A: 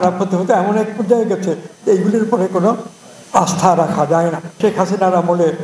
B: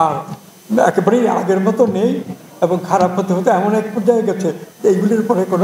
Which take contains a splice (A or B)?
A